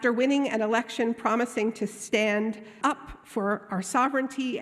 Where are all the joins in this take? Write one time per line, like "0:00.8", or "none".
0:02.8

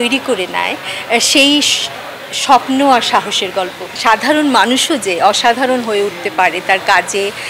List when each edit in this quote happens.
0:03.9

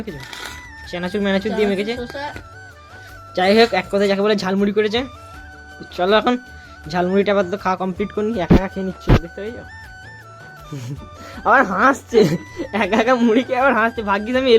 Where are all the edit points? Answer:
none

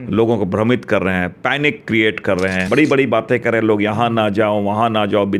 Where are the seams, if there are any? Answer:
0:02.7

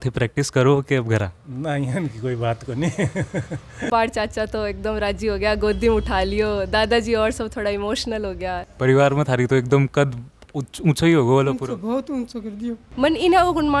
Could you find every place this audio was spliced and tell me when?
0:03.9
0:08.7
0:12.8

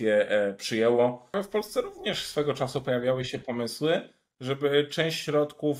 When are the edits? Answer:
0:01.4

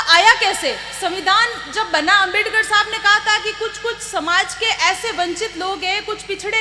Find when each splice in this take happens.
none

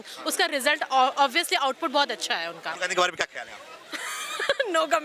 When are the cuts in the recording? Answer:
0:02.8

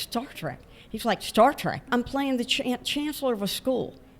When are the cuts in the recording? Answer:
0:01.9

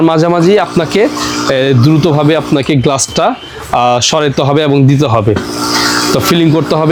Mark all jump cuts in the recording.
none

